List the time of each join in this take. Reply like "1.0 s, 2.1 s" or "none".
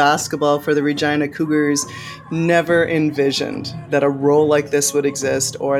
none